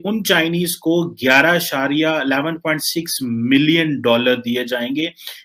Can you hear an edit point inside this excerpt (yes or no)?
no